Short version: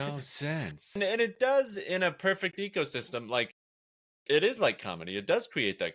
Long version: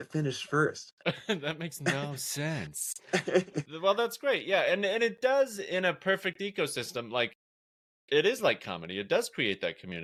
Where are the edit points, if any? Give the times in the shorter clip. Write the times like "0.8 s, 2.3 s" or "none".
1.0 s